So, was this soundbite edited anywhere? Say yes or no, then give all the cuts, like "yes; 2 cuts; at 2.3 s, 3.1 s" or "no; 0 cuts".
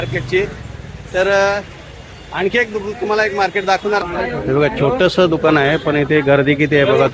yes; 1 cut; at 4.0 s